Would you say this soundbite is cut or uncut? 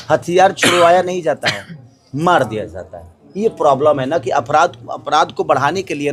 uncut